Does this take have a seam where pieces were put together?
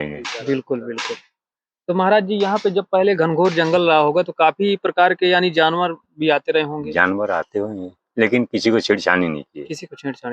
no; 0 cuts

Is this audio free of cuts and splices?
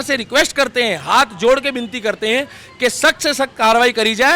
yes; 0 cuts

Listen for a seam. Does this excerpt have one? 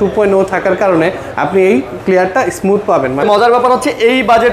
yes; 1 cut; at 3.2 s

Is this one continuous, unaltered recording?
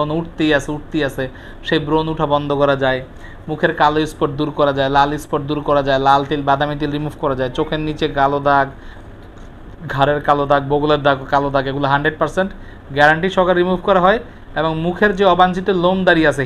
yes; 0 cuts

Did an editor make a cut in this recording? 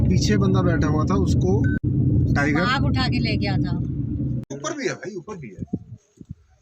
yes; 2 cuts; at 1.8 s, 4.5 s

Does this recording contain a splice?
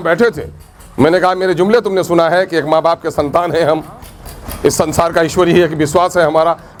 no; 0 cuts

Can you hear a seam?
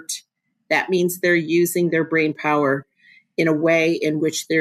no; 0 cuts

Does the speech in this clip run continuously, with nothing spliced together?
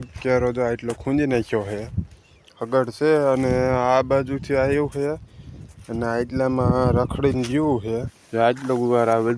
no; 1 cut; at 8.2 s

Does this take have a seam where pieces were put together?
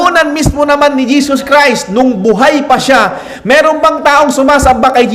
yes; 1 cut; at 3.3 s

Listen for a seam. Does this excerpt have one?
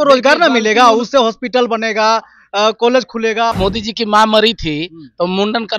yes; 1 cut; at 3.5 s

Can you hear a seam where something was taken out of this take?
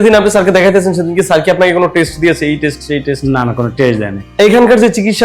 yes; 1 cut; at 4.1 s

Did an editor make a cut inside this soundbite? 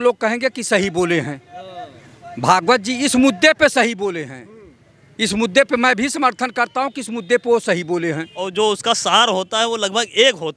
yes; 1 cut; at 8.4 s

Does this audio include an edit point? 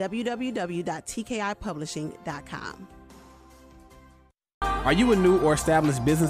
yes; 1 cut; at 4.6 s

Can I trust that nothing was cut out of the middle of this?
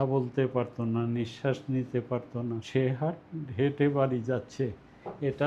no; 1 cut; at 2.6 s

